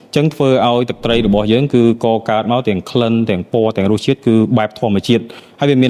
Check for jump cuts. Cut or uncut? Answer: uncut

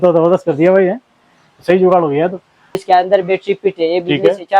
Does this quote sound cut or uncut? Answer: cut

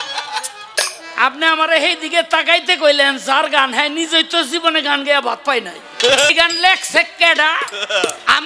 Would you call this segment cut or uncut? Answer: cut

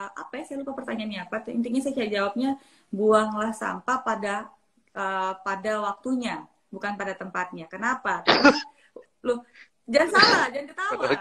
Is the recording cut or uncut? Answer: uncut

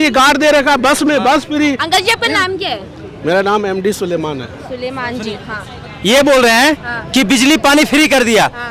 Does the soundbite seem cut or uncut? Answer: uncut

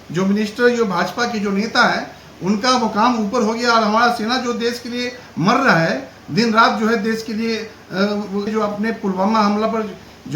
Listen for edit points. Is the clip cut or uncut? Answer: cut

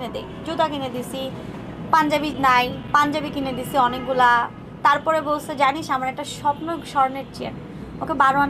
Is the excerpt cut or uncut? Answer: uncut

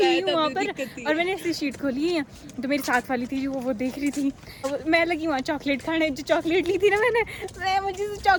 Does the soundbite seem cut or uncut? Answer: uncut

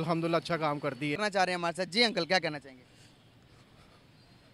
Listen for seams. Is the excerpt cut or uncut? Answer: cut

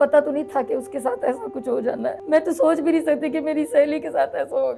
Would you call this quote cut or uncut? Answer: cut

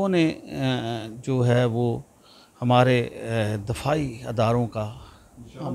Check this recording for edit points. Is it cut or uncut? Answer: uncut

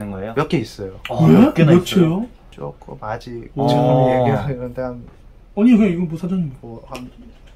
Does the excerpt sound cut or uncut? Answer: uncut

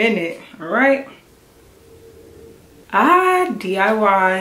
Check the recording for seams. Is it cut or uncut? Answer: cut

